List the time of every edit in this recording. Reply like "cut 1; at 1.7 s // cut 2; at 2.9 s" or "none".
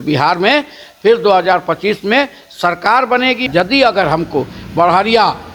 cut 1; at 3.5 s